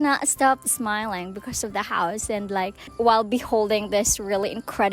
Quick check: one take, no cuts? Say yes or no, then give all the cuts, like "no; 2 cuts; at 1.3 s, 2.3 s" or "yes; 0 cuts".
no; 1 cut; at 2.9 s